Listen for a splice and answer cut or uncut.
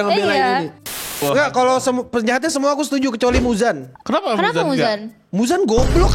cut